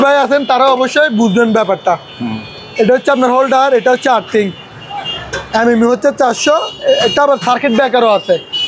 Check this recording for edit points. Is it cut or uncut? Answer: uncut